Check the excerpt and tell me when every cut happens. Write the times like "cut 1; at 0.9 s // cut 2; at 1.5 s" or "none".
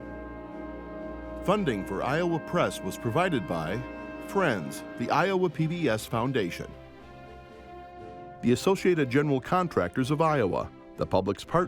cut 1; at 1.4 s